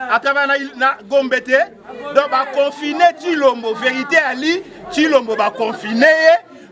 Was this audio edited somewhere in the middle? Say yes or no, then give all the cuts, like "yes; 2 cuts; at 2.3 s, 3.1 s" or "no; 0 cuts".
no; 0 cuts